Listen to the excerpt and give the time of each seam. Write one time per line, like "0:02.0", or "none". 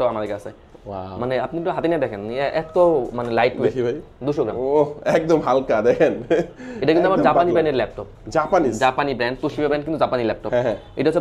none